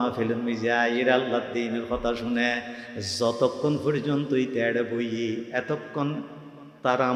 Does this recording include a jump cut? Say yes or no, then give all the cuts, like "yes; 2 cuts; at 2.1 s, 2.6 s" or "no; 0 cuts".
no; 0 cuts